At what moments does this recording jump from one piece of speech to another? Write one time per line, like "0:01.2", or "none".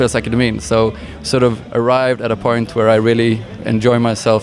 none